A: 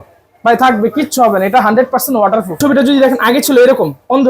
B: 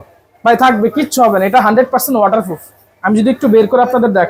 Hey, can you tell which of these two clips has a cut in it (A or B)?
A